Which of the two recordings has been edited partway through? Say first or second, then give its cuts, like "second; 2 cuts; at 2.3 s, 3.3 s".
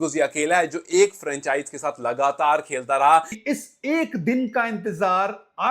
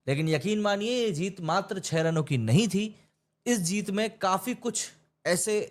first; 1 cut; at 3.4 s